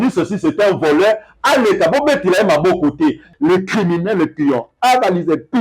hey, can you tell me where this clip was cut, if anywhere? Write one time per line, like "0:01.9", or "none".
0:03.3